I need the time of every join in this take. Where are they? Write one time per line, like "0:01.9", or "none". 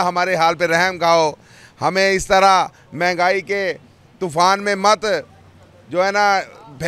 none